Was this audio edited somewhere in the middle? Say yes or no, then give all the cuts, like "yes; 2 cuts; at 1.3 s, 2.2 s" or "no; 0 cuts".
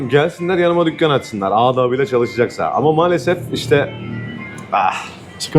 no; 0 cuts